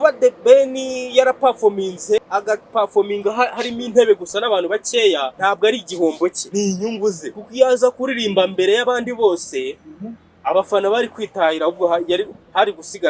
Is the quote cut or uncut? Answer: cut